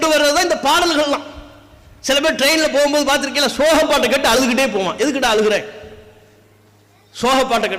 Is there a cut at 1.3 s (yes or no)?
no